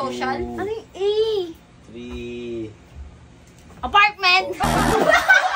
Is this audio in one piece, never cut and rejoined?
yes; 0 cuts

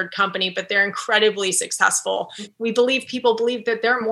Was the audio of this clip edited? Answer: yes; 1 cut; at 2.5 s

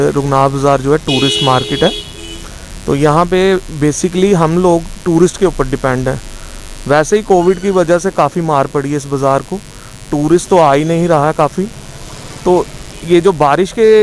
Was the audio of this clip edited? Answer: no; 0 cuts

